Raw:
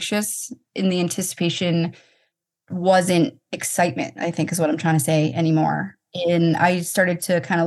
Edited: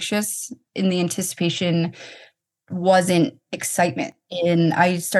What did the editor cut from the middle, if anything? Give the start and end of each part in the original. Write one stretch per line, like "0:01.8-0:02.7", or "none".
0:04.1-0:06.0